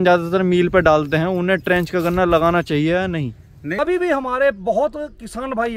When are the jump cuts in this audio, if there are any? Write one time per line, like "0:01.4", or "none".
0:03.8